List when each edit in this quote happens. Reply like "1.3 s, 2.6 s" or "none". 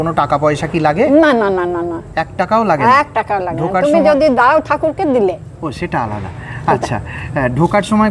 none